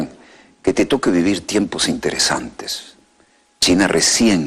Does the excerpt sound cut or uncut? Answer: uncut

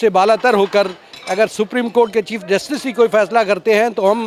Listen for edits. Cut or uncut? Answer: uncut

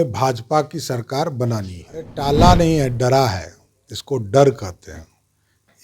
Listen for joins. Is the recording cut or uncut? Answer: cut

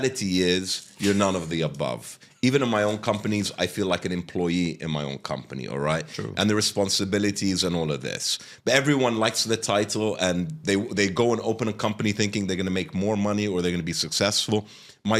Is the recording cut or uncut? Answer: uncut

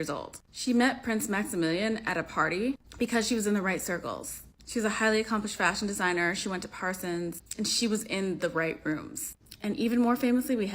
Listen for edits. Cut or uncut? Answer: cut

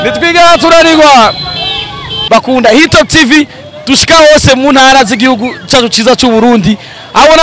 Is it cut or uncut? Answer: cut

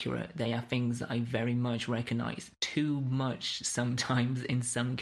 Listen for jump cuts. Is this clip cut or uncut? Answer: uncut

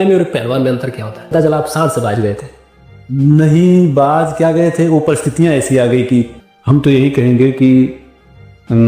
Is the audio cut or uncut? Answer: cut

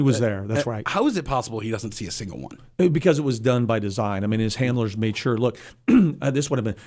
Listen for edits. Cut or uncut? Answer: uncut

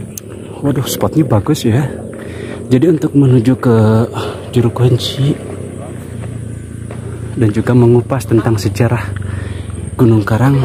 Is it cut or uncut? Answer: uncut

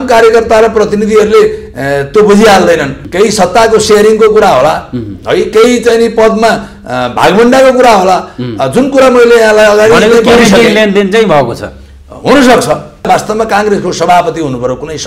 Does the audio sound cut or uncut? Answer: cut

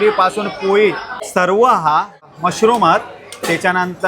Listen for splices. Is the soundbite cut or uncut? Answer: cut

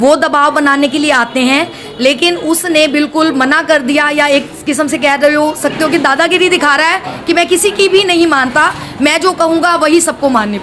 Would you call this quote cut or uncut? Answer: uncut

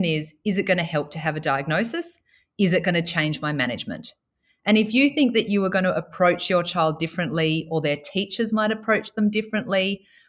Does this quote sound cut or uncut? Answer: uncut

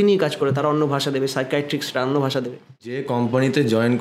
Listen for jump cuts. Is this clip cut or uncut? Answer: cut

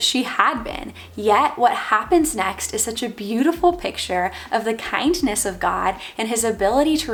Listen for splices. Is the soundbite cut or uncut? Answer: uncut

